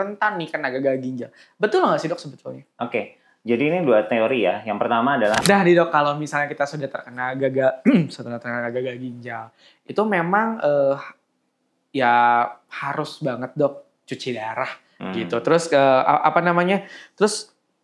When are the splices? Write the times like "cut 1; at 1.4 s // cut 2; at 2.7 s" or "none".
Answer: cut 1; at 5.4 s